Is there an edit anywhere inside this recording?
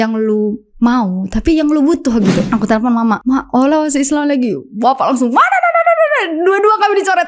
yes; 2 cuts; at 2.4 s, 3.2 s

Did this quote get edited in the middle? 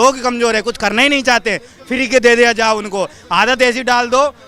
no; 0 cuts

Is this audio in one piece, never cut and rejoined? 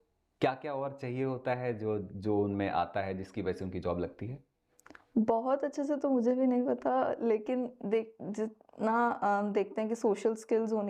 yes; 0 cuts

